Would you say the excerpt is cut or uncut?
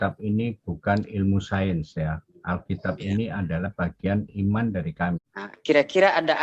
cut